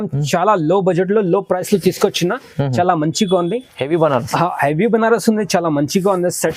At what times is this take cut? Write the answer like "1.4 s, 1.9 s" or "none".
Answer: none